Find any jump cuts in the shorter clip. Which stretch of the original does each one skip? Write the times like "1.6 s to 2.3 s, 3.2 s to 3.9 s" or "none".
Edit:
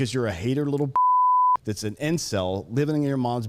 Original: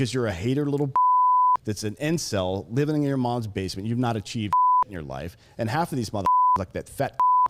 none